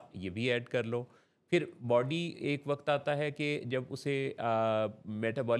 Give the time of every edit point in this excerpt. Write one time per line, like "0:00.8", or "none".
none